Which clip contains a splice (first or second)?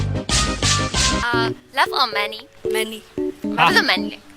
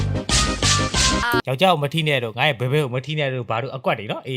second